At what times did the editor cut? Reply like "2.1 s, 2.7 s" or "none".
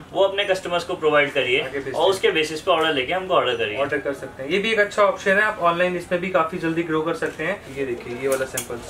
7.7 s